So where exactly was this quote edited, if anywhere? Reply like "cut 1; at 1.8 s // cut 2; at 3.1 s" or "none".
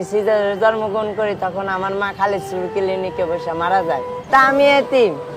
cut 1; at 4.1 s